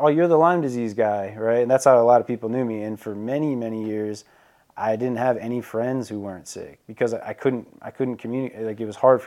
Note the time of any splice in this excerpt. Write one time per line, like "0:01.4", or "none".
none